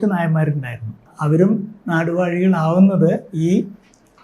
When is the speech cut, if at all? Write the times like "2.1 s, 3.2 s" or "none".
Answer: 1.1 s